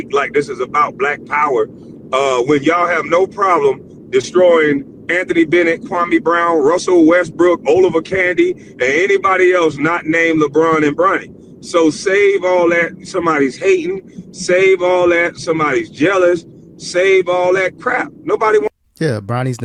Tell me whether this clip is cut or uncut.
uncut